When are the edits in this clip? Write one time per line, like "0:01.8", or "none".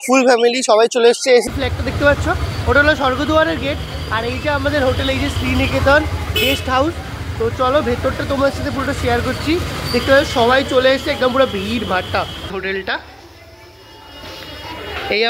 0:01.5
0:12.5